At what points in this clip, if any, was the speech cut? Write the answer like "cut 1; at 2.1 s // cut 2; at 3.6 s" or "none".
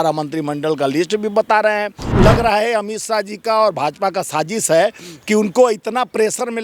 cut 1; at 2.0 s